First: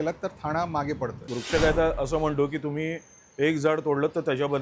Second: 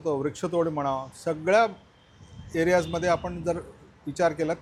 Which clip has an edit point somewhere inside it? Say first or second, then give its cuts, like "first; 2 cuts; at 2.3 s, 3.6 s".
first; 1 cut; at 1.3 s